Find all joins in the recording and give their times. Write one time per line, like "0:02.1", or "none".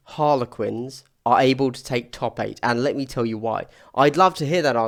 none